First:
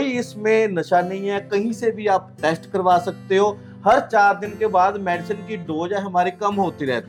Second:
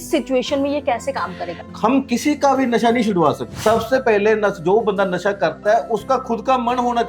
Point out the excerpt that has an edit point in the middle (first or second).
second